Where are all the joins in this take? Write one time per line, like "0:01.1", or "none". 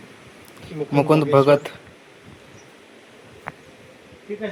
none